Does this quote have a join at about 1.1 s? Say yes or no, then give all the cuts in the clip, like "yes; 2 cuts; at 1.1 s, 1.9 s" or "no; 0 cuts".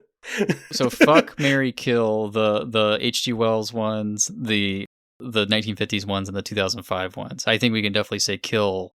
yes; 1 cut; at 1.1 s